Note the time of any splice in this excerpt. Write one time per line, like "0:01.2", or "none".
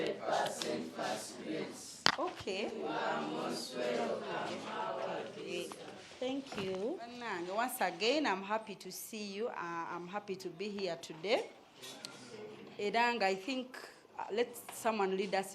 0:07.2